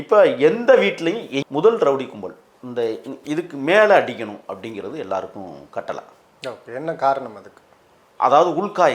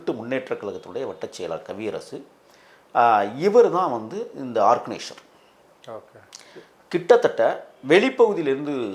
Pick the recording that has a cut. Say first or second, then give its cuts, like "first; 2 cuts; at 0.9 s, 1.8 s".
first; 1 cut; at 1.4 s